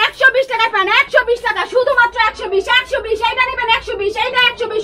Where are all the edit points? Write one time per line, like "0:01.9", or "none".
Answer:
none